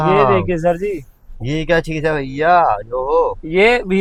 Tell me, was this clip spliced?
no; 0 cuts

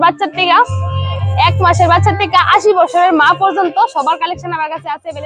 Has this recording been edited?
no; 0 cuts

